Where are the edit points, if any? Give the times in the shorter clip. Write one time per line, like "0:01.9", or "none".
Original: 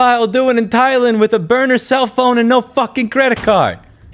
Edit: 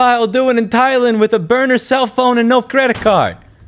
0:02.7